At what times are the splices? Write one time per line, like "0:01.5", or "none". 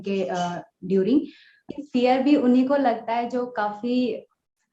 0:01.7